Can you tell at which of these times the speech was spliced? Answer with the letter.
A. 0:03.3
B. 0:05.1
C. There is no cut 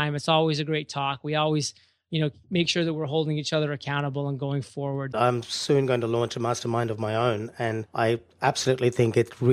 B